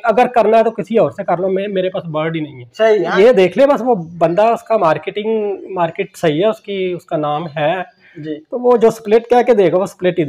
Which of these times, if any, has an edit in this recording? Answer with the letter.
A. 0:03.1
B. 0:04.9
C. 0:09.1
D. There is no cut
A